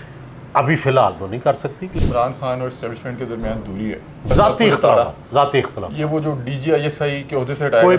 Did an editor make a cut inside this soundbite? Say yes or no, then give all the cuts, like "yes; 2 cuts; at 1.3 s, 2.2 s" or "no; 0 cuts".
yes; 2 cuts; at 1.9 s, 4.3 s